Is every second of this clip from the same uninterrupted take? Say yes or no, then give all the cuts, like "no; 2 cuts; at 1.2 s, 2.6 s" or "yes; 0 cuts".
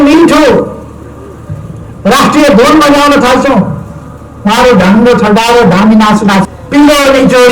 no; 1 cut; at 6.4 s